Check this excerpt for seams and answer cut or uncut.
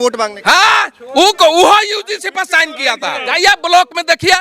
cut